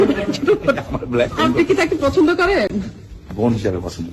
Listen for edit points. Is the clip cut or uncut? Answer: uncut